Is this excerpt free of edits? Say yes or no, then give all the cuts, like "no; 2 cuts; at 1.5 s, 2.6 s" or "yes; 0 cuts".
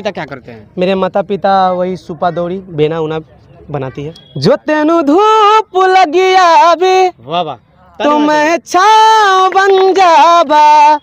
yes; 0 cuts